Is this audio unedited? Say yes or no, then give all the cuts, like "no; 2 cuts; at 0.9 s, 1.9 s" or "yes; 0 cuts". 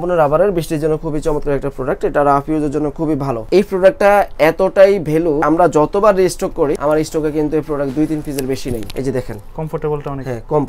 no; 4 cuts; at 3.4 s, 5.4 s, 6.8 s, 8.9 s